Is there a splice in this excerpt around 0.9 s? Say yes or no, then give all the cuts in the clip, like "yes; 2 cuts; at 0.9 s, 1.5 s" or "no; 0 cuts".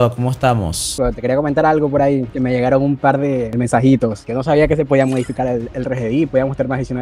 yes; 2 cuts; at 0.9 s, 2.3 s